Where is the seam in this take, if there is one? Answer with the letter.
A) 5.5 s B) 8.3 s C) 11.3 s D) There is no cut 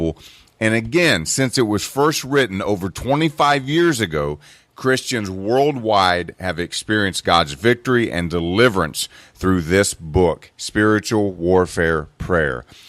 A